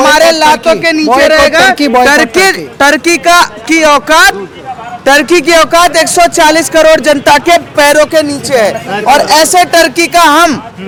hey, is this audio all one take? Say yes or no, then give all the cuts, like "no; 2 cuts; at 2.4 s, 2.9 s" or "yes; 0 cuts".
yes; 0 cuts